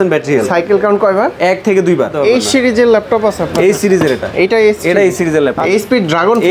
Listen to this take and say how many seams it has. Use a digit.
2